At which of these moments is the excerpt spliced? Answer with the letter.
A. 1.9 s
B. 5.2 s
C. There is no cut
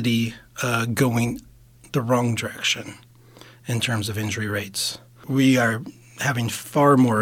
B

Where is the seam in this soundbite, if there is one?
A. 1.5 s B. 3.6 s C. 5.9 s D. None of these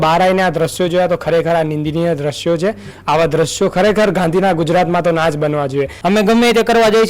C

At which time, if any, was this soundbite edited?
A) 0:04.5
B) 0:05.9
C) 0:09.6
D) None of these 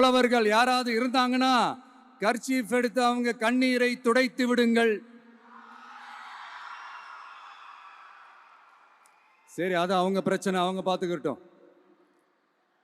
D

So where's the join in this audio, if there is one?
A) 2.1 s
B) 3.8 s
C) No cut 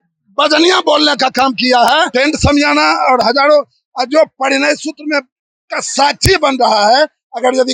A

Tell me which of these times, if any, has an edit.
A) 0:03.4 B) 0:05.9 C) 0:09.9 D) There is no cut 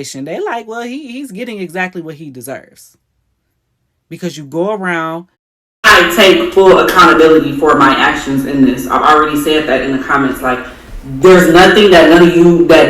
B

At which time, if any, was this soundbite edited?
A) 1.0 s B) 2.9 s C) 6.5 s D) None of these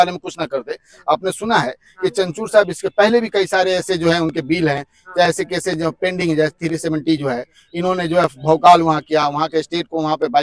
D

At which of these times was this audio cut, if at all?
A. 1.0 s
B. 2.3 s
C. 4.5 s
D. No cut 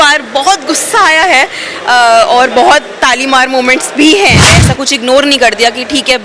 C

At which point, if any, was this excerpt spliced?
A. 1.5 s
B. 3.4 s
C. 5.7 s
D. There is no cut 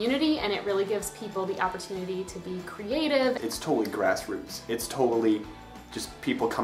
B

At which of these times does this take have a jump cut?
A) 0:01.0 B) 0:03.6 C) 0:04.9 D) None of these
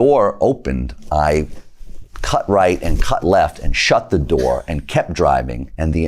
A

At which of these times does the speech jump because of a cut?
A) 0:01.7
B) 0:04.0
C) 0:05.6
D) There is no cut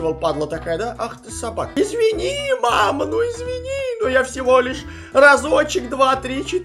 A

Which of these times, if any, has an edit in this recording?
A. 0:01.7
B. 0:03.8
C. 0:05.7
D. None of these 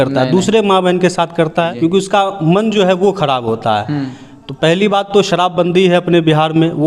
A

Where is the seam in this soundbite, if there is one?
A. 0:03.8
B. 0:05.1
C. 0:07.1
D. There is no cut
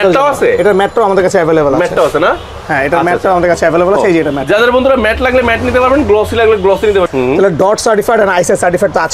C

